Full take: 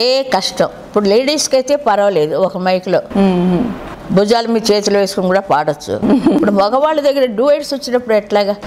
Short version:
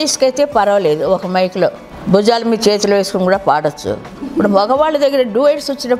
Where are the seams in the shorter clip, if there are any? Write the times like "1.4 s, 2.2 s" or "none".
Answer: 1.8 s